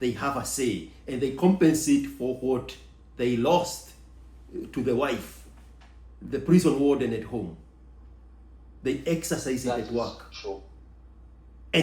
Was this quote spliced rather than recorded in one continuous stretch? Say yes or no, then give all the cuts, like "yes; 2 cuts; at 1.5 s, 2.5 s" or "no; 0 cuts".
no; 0 cuts